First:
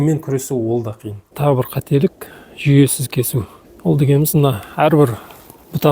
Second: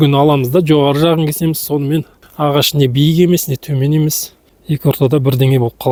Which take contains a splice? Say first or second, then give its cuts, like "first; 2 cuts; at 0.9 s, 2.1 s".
first; 1 cut; at 1.4 s